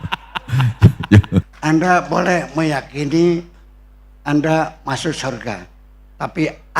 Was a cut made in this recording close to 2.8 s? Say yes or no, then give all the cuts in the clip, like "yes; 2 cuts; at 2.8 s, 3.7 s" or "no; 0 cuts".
no; 1 cut; at 1.5 s